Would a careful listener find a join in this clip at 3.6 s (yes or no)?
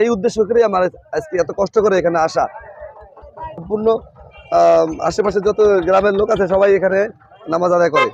yes